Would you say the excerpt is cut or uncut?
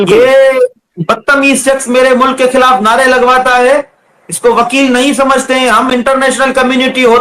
uncut